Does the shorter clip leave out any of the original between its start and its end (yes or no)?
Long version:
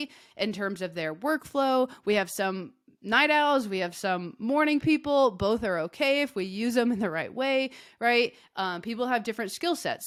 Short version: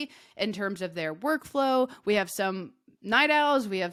no